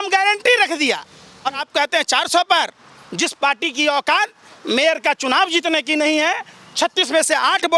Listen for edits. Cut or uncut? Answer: cut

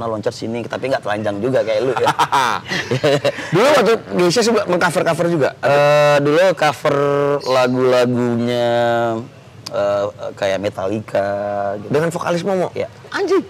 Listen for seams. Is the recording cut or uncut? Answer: uncut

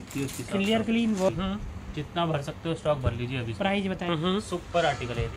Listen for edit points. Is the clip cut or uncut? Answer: cut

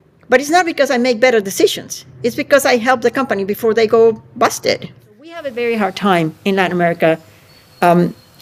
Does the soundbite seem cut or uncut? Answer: cut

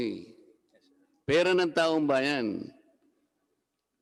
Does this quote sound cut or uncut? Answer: uncut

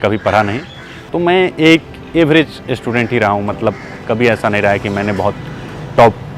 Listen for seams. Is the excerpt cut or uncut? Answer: cut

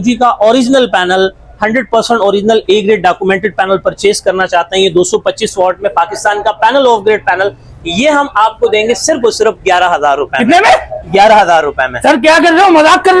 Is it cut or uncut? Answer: uncut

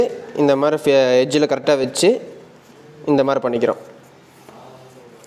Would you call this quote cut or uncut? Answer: uncut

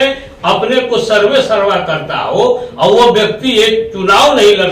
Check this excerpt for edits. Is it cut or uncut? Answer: uncut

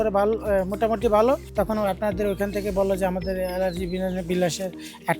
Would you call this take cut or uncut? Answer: cut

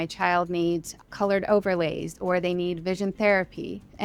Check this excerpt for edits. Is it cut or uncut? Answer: uncut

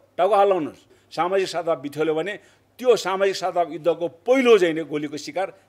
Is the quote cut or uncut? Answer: cut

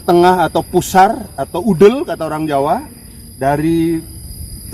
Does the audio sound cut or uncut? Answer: uncut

